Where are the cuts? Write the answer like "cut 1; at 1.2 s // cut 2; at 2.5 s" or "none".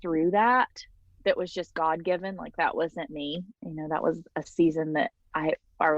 cut 1; at 1.1 s